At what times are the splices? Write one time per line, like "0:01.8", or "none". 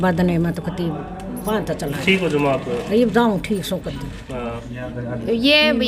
0:04.7